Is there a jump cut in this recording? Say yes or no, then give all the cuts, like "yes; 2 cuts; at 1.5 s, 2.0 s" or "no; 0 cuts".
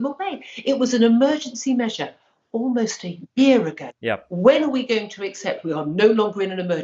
no; 0 cuts